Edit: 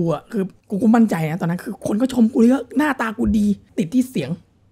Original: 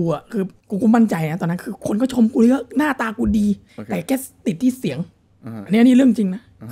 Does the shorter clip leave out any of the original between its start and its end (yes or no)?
yes